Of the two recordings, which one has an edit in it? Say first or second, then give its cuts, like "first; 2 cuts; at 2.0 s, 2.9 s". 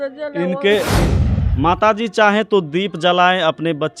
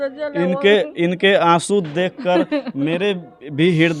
first; 1 cut; at 1.0 s